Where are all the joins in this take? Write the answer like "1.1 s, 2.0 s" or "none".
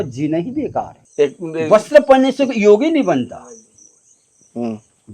1.0 s